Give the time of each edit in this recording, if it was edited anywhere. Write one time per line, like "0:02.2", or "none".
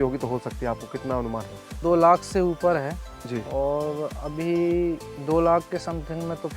0:01.8